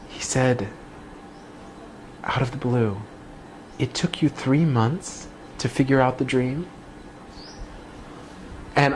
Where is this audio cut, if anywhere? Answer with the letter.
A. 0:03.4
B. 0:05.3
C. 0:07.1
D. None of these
D